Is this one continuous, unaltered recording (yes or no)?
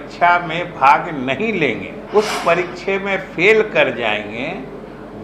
no